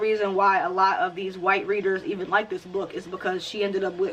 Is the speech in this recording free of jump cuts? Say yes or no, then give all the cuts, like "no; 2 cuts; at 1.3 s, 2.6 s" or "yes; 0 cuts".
yes; 0 cuts